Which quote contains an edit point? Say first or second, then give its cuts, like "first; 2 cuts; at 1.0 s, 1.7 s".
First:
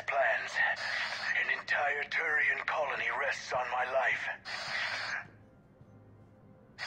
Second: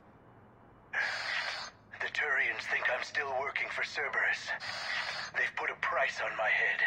second; 1 cut; at 1.5 s